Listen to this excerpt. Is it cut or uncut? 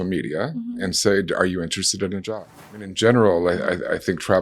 cut